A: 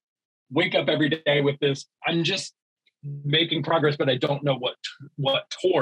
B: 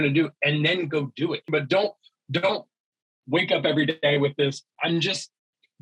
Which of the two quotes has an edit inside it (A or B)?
B